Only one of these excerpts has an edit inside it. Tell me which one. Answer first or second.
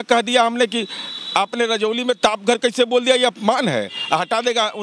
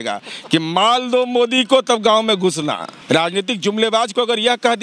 second